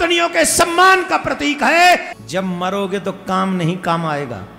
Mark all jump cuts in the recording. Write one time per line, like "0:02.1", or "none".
0:02.1